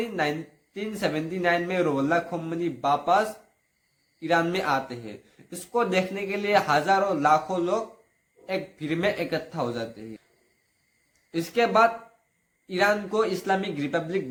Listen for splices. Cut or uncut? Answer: uncut